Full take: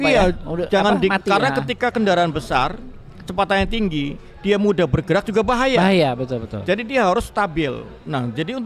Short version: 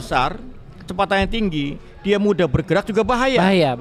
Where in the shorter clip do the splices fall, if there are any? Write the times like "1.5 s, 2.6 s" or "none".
none